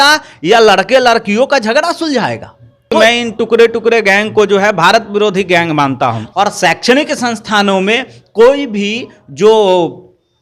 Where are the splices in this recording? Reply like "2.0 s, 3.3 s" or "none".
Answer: 3.0 s, 6.2 s